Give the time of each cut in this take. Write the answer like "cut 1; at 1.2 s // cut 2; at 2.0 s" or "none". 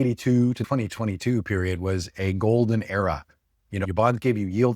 cut 1; at 3.8 s